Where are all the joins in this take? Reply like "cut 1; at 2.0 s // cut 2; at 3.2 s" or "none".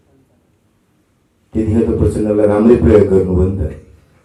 none